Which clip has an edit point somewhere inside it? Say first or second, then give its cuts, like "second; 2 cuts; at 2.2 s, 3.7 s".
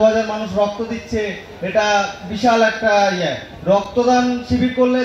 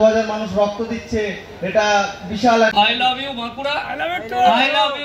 second; 1 cut; at 2.8 s